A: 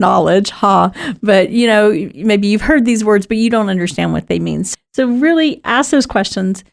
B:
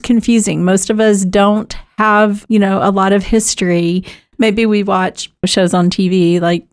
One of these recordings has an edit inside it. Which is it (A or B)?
A